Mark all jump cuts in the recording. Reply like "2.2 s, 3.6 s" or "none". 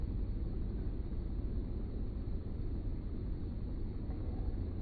3.8 s